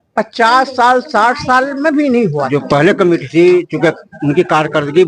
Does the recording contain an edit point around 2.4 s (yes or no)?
yes